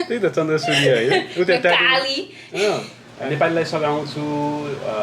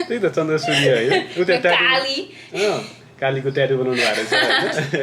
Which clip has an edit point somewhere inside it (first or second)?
first